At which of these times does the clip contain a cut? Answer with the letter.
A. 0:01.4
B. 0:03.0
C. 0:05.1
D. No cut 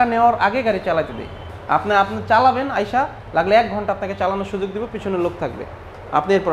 A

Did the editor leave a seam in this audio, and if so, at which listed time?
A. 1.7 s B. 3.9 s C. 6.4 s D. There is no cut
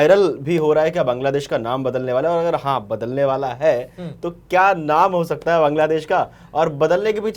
D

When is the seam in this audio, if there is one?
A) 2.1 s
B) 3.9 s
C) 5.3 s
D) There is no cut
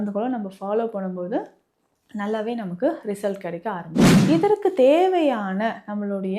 B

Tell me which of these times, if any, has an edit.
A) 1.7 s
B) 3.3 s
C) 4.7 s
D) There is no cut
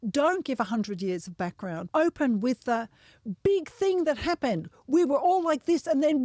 A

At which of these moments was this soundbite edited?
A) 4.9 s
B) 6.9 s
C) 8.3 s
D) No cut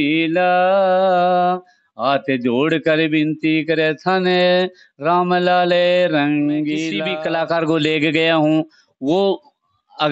B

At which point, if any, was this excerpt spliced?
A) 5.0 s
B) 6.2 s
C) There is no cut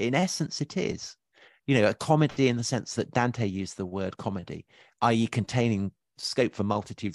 B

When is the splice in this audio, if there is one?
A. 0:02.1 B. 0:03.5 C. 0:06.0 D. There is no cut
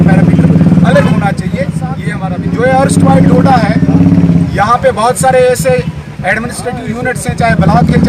A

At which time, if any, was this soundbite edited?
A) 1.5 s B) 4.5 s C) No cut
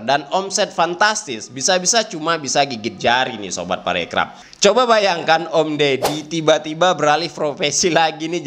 B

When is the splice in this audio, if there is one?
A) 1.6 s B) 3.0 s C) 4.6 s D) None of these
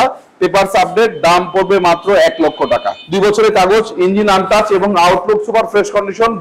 B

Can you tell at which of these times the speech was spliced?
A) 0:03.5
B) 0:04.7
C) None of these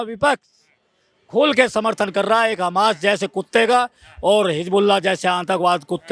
C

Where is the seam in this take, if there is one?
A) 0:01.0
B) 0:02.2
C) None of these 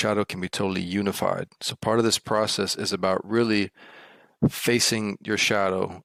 C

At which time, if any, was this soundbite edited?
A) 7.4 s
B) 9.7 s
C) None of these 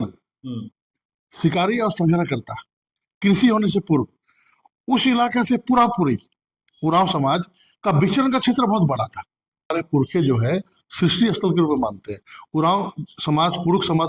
B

